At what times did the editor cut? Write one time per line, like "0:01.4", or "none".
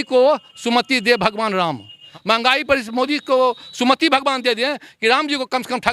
0:02.0